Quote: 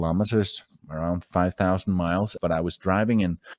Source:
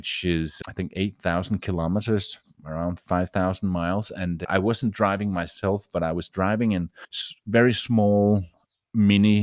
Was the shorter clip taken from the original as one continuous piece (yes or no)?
no